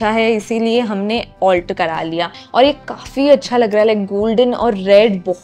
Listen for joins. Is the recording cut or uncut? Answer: cut